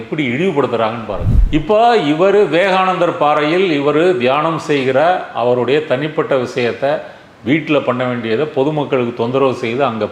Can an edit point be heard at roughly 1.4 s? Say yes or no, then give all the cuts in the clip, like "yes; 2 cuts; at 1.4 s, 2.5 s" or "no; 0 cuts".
yes; 1 cut; at 1.4 s